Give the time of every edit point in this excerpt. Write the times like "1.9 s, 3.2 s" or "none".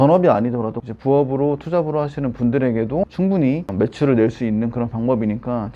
none

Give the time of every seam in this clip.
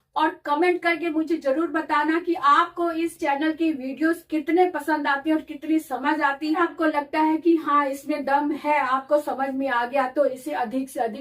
6.6 s

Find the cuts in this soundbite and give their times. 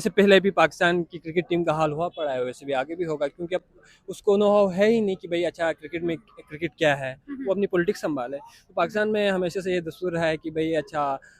none

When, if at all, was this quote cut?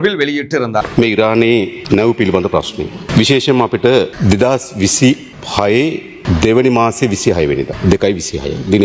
0.9 s, 1.8 s, 3.0 s, 4.1 s, 5.4 s, 6.1 s, 7.7 s

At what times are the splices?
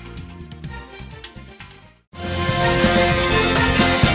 none

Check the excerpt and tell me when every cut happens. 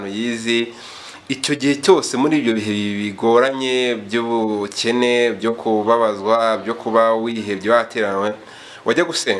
none

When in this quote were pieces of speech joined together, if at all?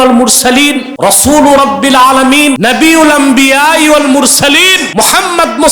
0.9 s, 2.6 s, 4.8 s

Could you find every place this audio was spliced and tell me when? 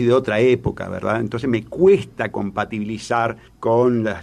none

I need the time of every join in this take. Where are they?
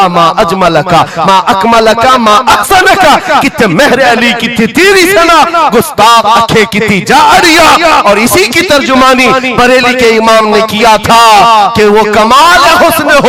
none

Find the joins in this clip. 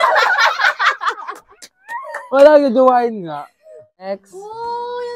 4.0 s

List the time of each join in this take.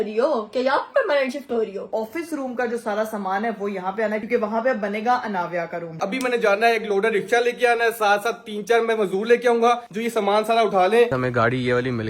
1.9 s, 4.2 s, 6.0 s, 11.1 s

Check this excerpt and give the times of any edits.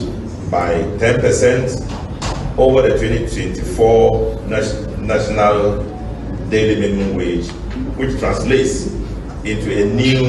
none

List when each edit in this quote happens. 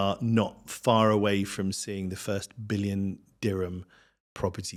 none

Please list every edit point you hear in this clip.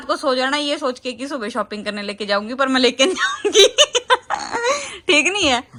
none

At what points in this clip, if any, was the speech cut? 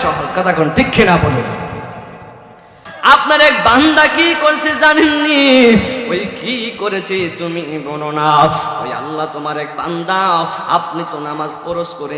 3.0 s

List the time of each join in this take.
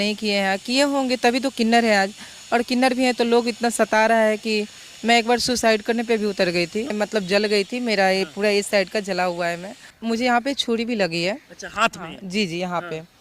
6.9 s, 9.9 s

